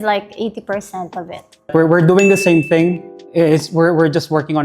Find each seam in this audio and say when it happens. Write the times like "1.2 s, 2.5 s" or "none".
1.7 s